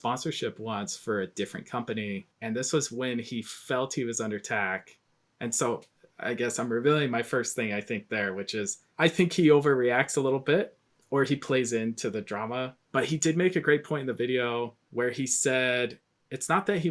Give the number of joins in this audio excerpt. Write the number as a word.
two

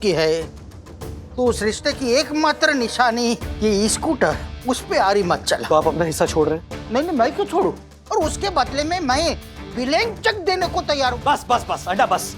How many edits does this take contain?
three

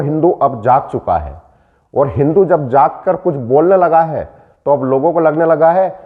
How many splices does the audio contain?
zero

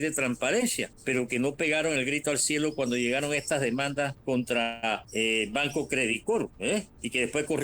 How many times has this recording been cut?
four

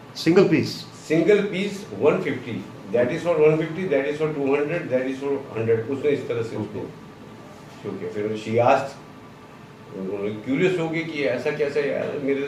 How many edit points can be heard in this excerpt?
zero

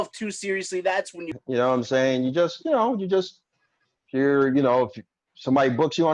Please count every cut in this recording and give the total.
one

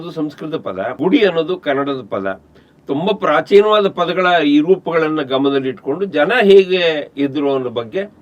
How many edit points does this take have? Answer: one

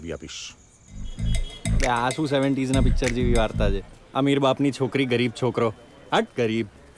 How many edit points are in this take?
one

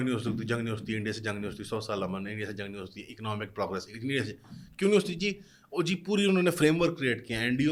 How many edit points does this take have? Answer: zero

